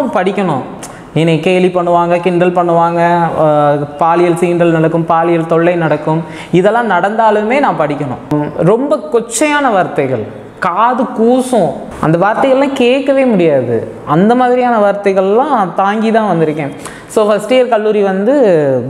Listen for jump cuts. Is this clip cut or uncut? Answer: cut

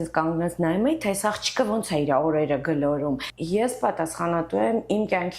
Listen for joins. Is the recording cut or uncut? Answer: cut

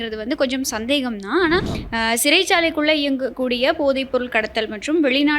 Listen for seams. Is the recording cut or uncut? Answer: cut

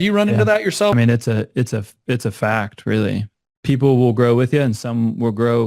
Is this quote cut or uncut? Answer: cut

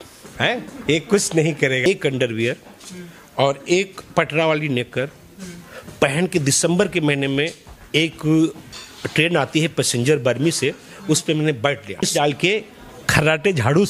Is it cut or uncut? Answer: cut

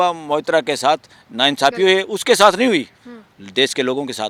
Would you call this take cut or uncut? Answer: uncut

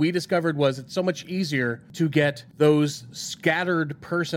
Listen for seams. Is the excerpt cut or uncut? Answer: cut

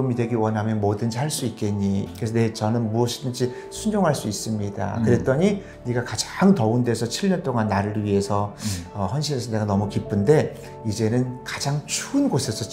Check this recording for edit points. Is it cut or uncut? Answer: cut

